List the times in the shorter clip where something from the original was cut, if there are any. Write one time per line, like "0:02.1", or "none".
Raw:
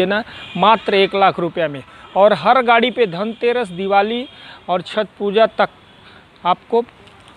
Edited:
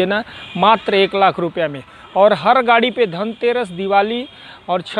none